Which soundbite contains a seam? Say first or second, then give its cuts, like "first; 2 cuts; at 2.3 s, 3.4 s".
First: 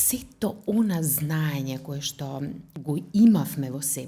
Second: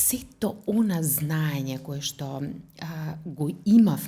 first; 1 cut; at 2.7 s